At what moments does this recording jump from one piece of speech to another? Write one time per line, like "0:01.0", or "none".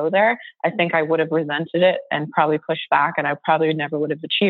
none